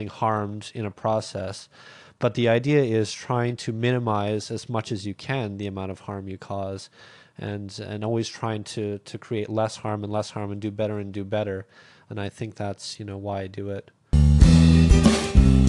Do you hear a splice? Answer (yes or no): yes